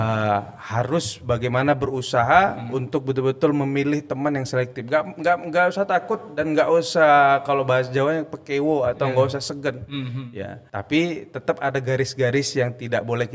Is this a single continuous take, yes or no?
no